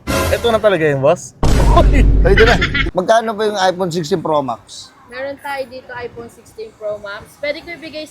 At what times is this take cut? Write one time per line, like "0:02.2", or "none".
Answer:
0:02.7